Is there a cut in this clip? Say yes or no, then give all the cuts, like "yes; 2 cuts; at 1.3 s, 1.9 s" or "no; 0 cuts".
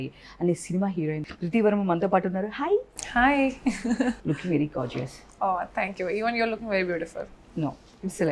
yes; 1 cut; at 1.3 s